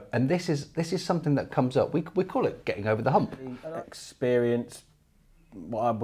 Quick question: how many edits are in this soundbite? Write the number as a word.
one